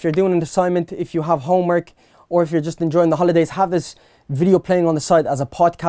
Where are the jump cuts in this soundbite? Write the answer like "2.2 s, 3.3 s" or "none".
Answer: none